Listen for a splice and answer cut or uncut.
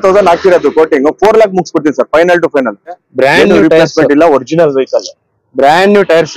cut